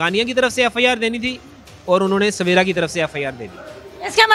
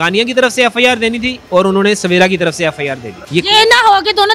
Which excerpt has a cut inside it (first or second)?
second